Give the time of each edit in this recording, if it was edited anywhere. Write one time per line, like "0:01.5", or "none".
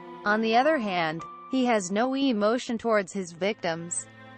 none